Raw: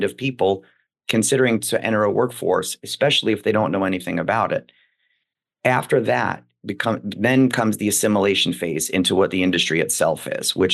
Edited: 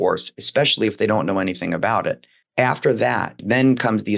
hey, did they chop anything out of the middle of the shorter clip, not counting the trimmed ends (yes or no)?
yes